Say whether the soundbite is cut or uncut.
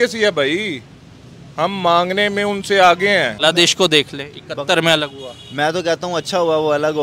cut